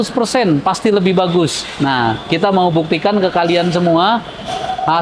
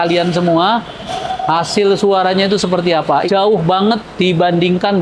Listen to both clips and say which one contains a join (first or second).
second